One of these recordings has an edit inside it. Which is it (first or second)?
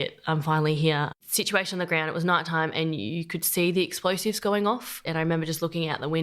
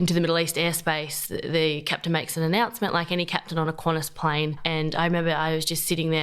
first